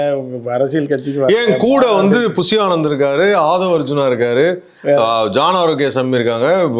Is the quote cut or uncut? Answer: uncut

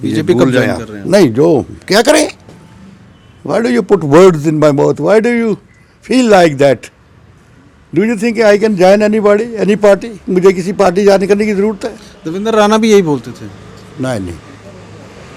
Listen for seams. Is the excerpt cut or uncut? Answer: uncut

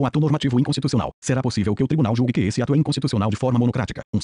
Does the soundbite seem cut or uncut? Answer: cut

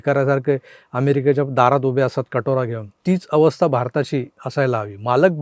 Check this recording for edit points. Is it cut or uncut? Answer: cut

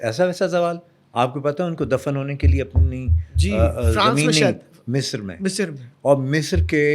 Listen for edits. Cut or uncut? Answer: uncut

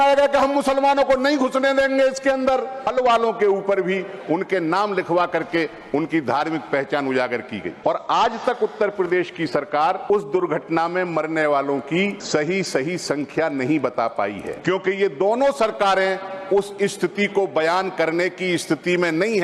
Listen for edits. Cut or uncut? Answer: cut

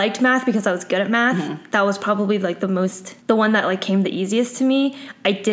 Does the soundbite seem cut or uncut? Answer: cut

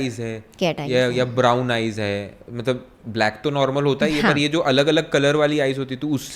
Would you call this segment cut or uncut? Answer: uncut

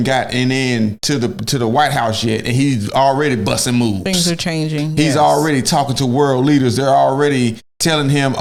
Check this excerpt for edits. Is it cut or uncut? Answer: uncut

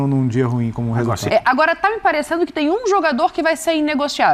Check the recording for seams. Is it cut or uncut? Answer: cut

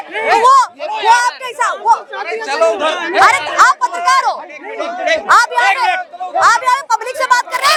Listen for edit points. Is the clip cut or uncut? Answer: uncut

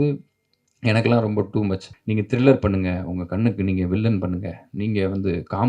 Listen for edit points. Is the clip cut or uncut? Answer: cut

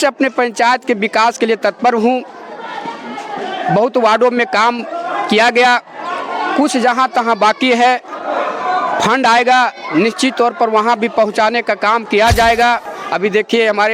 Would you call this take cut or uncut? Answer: cut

